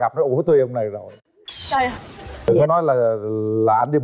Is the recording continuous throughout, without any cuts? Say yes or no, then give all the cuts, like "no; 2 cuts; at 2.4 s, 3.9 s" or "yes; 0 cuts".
no; 1 cut; at 2.5 s